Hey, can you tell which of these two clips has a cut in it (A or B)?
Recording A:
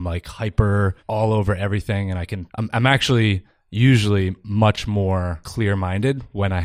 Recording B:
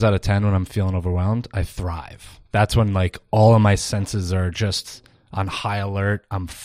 A